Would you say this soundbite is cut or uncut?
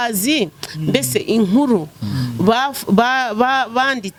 uncut